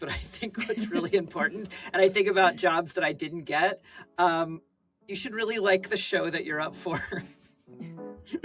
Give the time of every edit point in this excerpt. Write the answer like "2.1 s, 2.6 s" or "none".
none